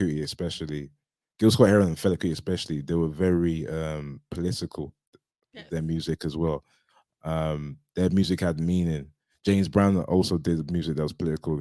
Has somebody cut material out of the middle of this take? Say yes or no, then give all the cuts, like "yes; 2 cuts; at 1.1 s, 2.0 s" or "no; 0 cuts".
no; 0 cuts